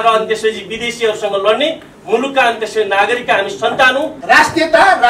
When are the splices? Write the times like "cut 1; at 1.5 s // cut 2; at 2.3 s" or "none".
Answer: cut 1; at 4.1 s